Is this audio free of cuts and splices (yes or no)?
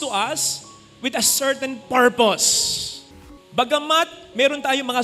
no